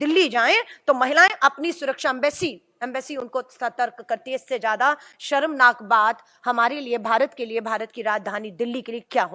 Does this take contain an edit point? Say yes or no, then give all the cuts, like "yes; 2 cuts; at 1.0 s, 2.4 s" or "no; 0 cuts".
no; 0 cuts